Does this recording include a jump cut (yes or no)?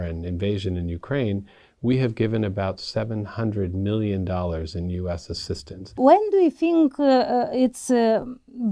yes